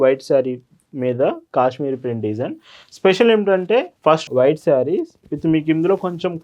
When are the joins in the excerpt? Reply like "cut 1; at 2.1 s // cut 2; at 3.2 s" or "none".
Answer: cut 1; at 4.2 s